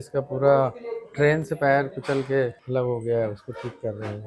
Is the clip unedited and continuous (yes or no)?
no